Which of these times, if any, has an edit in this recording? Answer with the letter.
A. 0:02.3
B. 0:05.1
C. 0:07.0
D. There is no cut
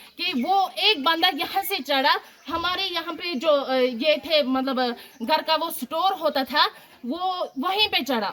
D